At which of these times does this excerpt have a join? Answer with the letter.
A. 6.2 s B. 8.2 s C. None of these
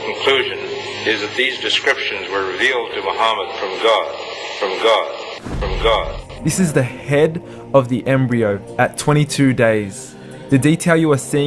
A